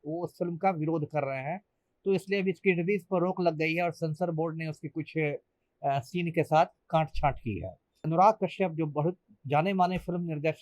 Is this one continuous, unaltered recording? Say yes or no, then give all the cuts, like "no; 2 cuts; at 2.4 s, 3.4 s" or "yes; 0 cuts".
no; 1 cut; at 8.0 s